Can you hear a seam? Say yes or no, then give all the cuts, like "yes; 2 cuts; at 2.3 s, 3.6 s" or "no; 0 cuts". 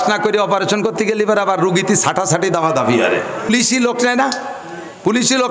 yes; 1 cut; at 3.5 s